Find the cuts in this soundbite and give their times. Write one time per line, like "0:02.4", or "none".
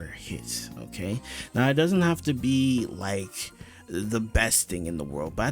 none